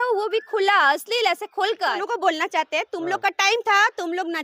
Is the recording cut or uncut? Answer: cut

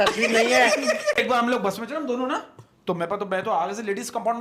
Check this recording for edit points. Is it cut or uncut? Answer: cut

